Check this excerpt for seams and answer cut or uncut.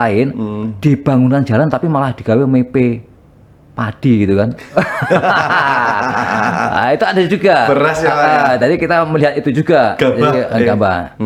uncut